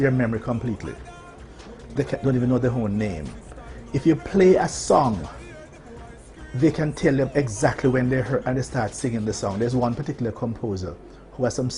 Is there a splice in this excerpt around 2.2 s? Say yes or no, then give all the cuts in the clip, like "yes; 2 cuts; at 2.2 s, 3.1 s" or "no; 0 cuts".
no; 1 cut; at 9.0 s